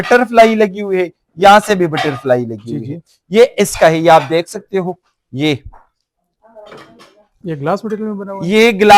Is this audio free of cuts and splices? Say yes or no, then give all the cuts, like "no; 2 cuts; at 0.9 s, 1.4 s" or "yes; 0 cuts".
yes; 0 cuts